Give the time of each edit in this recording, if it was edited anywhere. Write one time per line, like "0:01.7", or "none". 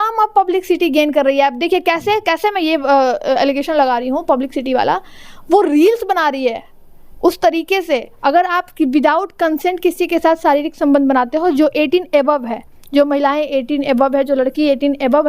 0:08.1